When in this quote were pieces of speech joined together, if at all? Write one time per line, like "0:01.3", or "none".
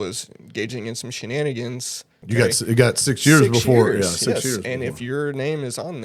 0:02.2